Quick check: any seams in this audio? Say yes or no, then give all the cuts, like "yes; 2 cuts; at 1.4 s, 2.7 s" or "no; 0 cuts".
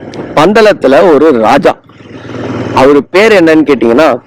no; 0 cuts